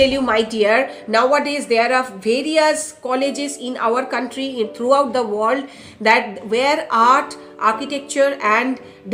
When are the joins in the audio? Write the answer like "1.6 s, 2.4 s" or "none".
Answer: none